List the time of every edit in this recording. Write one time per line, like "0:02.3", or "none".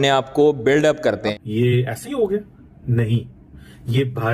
0:01.3